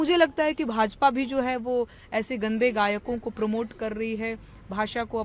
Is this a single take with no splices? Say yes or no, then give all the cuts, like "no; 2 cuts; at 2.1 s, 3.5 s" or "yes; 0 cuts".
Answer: yes; 0 cuts